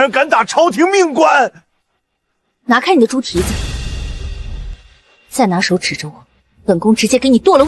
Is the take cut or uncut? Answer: uncut